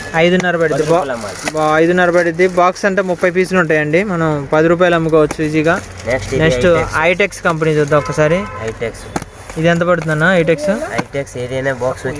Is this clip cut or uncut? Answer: uncut